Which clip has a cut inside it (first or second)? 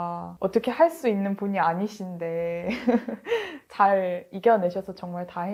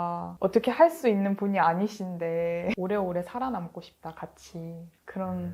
second